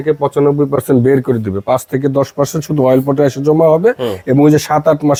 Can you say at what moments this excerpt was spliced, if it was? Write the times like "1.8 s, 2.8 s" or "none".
none